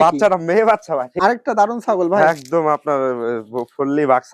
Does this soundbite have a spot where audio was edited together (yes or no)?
yes